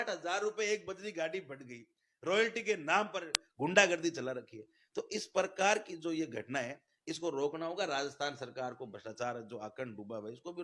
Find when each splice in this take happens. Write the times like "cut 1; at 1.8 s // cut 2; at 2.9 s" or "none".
none